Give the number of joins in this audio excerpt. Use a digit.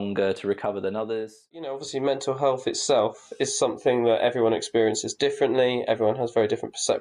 1